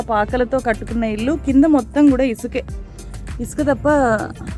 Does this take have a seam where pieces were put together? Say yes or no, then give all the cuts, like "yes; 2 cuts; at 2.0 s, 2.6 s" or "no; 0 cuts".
no; 0 cuts